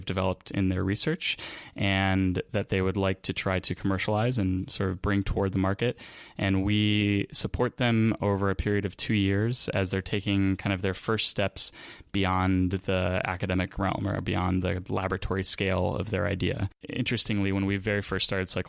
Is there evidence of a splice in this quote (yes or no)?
yes